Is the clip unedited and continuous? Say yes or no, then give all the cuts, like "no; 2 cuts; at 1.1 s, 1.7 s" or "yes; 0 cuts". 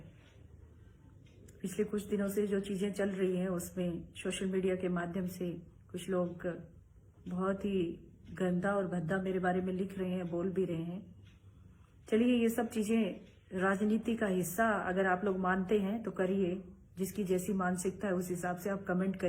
no; 1 cut; at 3.1 s